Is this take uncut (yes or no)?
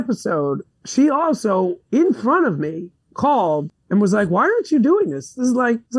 yes